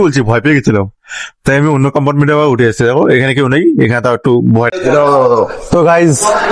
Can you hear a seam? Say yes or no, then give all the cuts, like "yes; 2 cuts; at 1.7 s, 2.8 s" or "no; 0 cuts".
yes; 1 cut; at 4.7 s